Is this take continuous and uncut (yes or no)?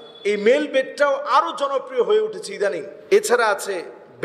no